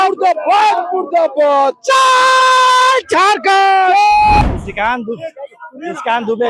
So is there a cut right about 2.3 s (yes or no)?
no